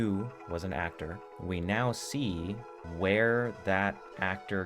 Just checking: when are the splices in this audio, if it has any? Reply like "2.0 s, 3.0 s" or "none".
1.3 s, 2.8 s